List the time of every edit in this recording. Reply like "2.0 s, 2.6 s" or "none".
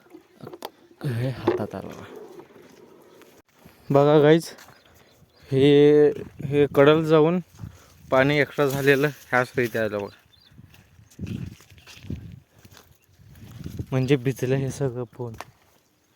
3.5 s